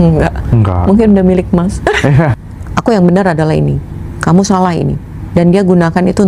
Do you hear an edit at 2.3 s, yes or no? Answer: yes